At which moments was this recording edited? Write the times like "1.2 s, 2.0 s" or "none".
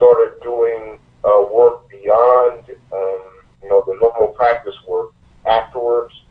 none